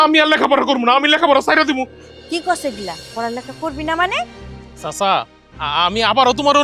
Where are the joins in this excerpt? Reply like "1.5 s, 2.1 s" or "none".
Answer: 2.0 s, 4.6 s